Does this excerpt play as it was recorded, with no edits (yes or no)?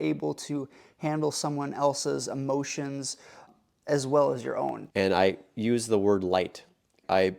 no